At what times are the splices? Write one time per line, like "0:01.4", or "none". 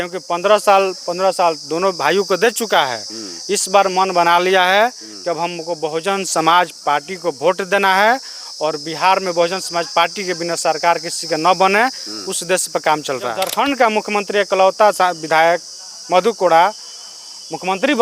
0:13.4